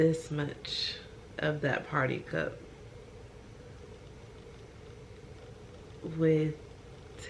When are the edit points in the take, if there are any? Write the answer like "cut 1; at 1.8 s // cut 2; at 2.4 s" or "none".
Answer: none